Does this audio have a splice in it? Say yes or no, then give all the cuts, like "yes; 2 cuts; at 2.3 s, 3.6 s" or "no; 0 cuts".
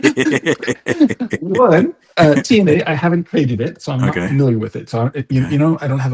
yes; 1 cut; at 2.0 s